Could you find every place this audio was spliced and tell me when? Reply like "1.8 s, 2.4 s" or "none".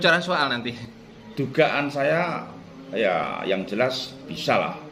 none